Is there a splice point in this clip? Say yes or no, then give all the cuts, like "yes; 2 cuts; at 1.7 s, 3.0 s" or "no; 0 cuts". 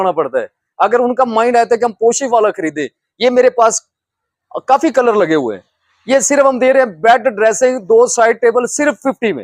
no; 0 cuts